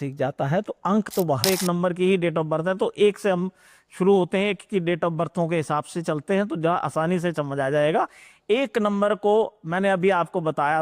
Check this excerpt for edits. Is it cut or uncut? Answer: cut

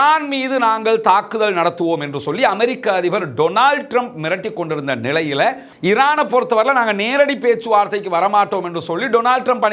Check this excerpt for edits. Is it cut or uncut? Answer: cut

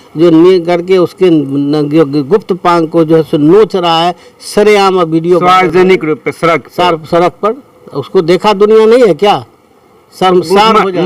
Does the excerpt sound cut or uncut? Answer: uncut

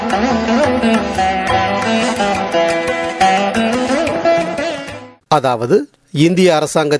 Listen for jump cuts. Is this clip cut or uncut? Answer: cut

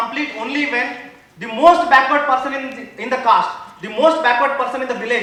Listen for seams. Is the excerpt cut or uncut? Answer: uncut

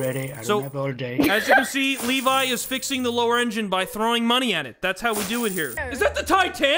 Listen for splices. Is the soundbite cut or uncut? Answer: cut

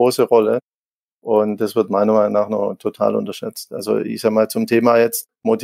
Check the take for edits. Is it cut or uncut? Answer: uncut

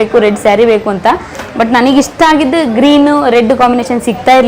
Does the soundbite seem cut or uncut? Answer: uncut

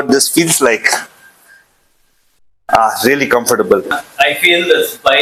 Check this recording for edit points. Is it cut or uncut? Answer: cut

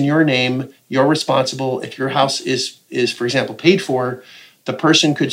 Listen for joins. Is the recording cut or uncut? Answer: uncut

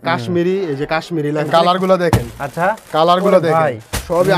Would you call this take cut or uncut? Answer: cut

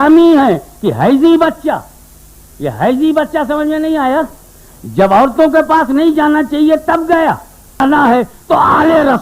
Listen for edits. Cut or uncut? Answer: cut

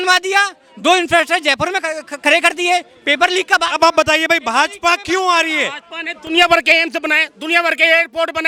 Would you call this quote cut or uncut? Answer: uncut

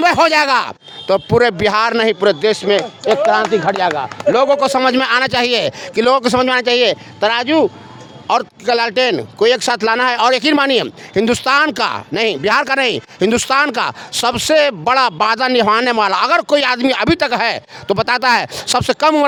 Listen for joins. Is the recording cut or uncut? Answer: uncut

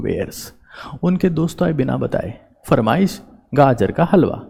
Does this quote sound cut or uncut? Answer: uncut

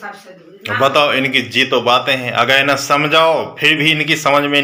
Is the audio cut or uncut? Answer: uncut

